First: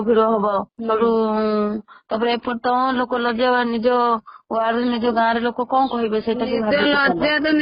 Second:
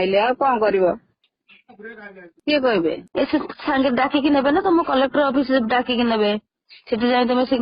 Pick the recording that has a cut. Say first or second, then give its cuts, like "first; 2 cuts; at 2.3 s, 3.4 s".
second; 1 cut; at 1.3 s